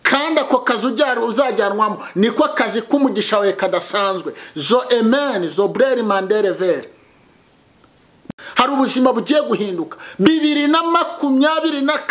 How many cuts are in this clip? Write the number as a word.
one